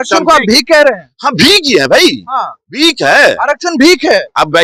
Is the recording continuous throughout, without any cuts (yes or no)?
yes